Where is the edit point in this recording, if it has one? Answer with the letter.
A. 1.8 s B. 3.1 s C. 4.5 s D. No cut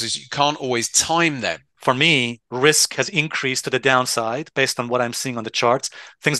A